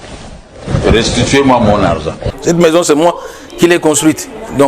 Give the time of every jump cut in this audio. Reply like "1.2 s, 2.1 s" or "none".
2.3 s